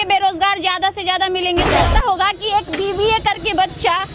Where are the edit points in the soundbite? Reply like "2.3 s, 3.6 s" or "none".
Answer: 1.9 s